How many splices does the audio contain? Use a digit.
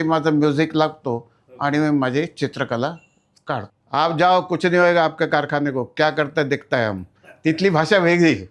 1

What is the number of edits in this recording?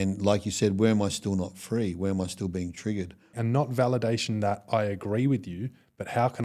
1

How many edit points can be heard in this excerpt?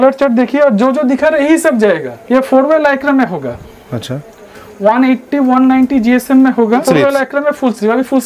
2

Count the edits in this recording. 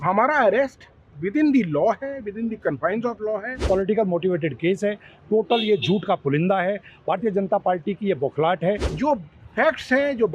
2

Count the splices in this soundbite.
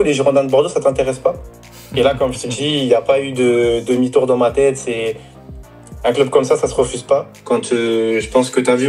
1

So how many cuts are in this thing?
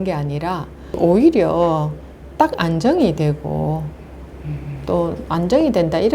1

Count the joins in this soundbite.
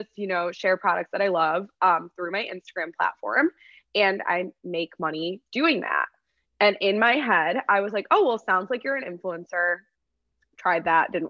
0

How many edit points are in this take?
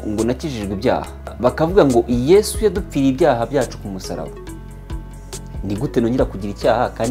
3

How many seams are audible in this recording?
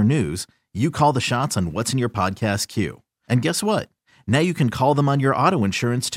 0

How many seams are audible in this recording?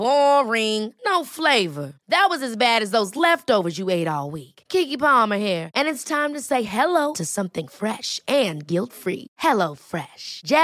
0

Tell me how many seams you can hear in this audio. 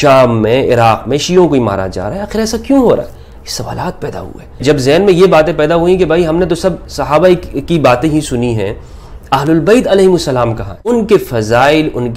2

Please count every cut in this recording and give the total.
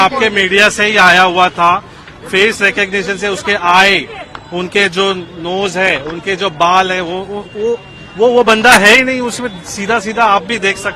0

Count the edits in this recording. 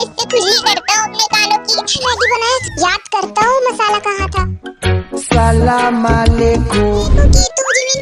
2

